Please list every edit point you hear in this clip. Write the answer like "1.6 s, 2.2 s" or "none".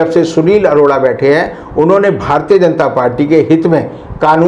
none